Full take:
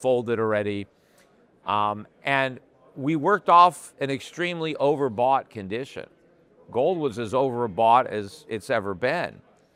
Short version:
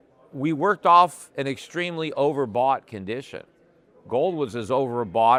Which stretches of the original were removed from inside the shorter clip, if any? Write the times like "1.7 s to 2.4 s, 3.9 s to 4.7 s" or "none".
none